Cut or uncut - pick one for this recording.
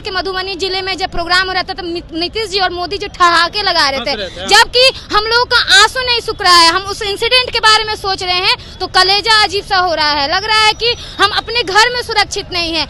uncut